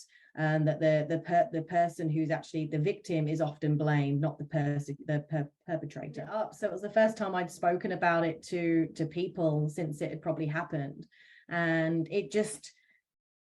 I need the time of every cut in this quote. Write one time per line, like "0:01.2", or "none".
0:06.3